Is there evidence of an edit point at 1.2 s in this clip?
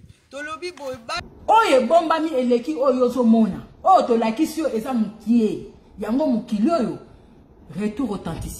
yes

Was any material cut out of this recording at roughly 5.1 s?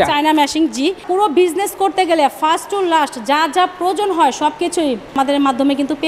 yes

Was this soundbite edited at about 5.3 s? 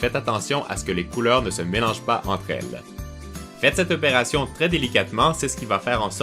no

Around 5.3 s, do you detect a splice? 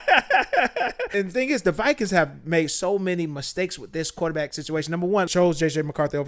yes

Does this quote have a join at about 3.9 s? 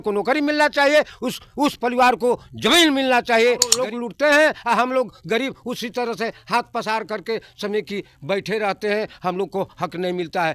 yes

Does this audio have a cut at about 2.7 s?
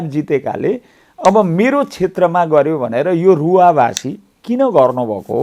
no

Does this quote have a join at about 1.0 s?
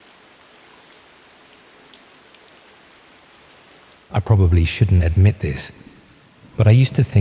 no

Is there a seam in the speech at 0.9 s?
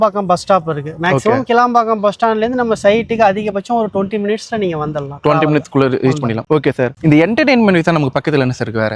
no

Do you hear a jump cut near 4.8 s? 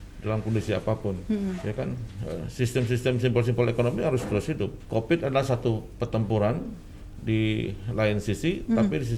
yes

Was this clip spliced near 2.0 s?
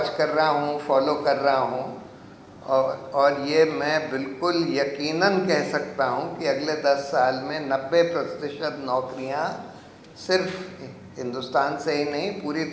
no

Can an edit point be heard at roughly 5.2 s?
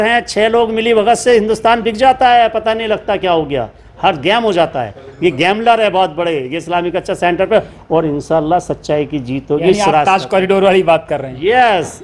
no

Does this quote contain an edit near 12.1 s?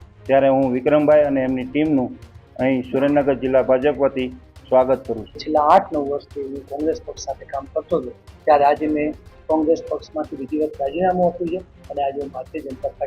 no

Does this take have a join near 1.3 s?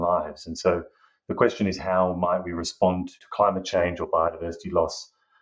no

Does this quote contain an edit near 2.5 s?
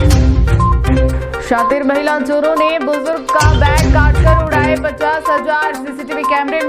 no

